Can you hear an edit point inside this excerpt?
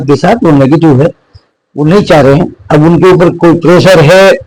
no; 0 cuts

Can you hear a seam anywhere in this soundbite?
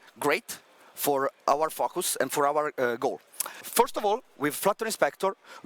yes; 2 cuts; at 1.4 s, 3.6 s

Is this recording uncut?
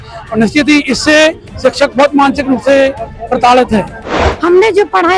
no; 1 cut; at 4.3 s

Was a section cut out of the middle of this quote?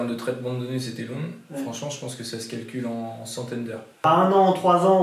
yes; 1 cut; at 3.9 s

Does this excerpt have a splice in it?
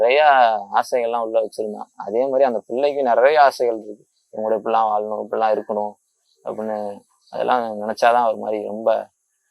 no; 0 cuts

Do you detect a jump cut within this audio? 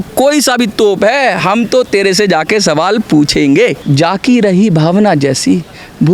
yes; 1 cut; at 3.8 s

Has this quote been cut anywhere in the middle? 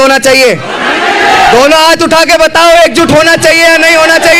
no; 0 cuts

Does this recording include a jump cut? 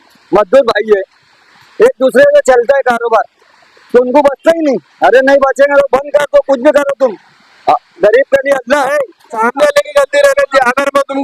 yes; 1 cut; at 9.4 s

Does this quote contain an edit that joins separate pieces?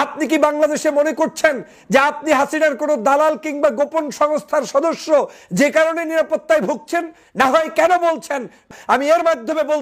yes; 1 cut; at 8.7 s

